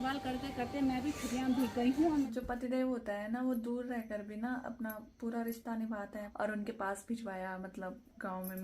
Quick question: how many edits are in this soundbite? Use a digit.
2